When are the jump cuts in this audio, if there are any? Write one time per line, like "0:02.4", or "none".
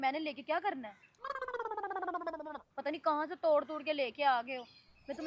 none